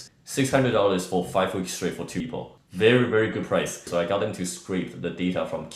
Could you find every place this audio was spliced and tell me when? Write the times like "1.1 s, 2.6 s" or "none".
3.8 s